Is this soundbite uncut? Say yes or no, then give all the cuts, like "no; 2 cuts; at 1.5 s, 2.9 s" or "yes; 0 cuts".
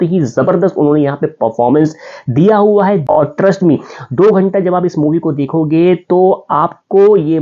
no; 1 cut; at 3.1 s